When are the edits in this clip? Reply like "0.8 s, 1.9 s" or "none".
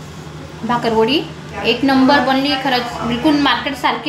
none